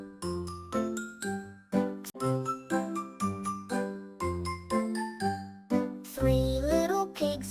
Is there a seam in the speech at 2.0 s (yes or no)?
yes